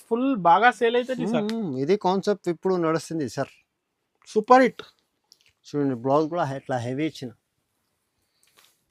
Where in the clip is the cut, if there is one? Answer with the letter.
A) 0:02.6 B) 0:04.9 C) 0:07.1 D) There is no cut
D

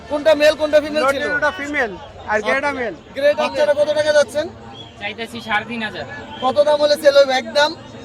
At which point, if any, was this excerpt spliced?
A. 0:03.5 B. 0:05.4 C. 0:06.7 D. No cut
A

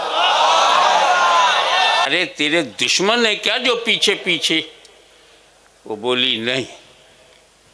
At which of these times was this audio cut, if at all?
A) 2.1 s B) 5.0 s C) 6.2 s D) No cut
A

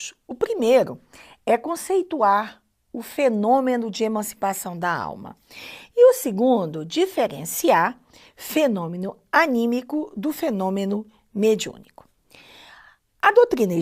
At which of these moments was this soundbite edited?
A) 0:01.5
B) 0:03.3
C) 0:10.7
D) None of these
C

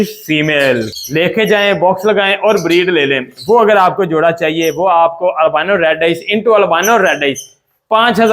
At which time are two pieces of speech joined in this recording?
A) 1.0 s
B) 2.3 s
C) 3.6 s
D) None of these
A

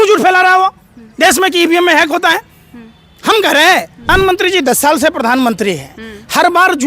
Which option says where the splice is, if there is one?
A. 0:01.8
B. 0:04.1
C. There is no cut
B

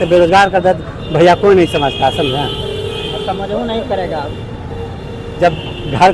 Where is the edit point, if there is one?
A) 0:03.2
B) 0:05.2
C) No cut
C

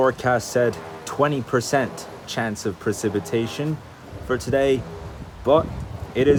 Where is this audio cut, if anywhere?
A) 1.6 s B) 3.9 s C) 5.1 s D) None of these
D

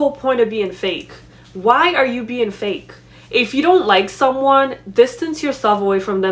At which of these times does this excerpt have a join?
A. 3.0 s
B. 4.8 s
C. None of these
C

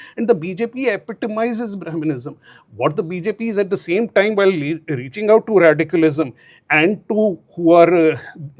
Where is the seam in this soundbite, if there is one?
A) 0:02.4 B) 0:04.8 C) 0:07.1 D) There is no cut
D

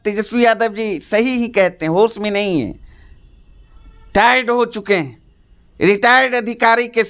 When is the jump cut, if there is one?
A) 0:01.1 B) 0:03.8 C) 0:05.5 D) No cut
D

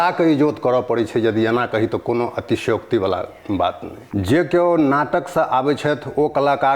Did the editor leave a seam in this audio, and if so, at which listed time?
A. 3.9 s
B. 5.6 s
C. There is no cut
A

